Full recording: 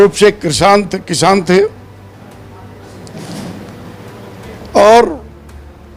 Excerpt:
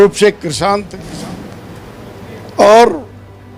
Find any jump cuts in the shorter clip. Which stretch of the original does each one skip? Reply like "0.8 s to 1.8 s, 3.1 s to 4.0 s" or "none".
1.0 s to 3.1 s